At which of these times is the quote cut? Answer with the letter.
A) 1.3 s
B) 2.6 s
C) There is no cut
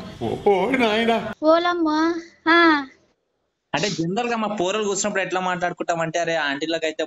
A